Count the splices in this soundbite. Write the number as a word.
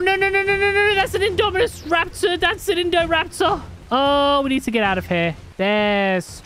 two